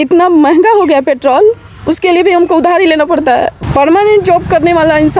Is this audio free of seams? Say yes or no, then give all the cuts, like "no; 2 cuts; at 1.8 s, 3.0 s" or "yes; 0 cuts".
no; 1 cut; at 3.6 s